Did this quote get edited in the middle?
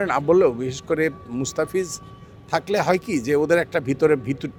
no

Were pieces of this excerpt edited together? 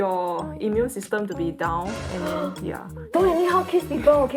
no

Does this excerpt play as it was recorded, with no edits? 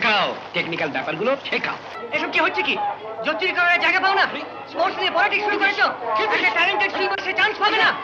no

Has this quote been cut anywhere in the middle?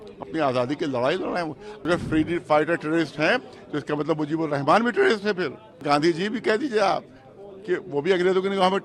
yes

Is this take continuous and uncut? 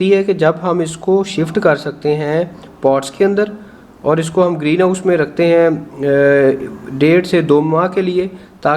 yes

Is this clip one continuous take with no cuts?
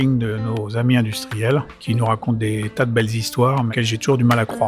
no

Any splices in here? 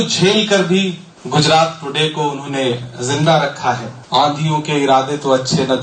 yes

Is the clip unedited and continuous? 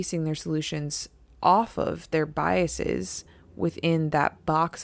yes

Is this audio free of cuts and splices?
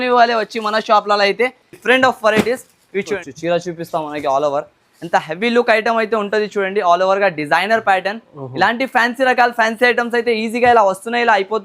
no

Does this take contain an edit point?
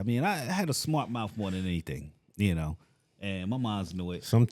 no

